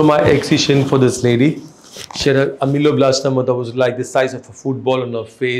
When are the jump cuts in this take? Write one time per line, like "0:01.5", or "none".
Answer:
none